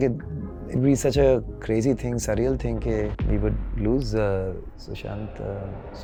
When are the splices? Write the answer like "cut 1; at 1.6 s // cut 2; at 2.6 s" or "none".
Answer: none